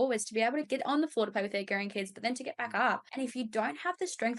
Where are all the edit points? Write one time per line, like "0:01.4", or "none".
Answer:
0:03.1